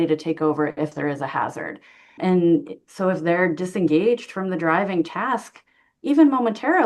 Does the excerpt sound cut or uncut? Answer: cut